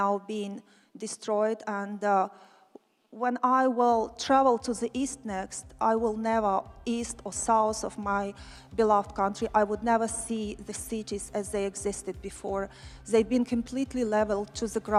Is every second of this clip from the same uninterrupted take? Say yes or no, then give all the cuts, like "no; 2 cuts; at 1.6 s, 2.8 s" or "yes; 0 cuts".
yes; 0 cuts